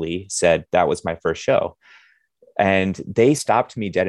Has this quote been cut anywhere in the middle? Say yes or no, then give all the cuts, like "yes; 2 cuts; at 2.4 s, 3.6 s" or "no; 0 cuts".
no; 0 cuts